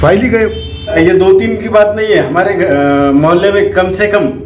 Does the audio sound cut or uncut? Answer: cut